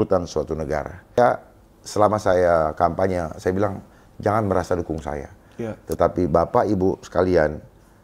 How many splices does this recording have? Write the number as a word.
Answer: one